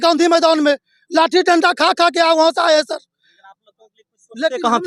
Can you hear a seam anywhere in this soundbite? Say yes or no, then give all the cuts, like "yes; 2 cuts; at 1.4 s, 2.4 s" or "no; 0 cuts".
no; 0 cuts